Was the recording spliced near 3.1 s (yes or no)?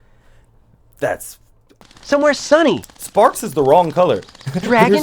no